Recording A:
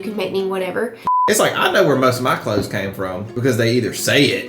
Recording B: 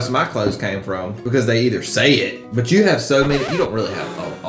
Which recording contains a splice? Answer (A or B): A